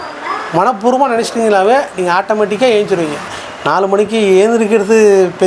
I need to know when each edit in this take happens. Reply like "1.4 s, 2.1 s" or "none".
3.4 s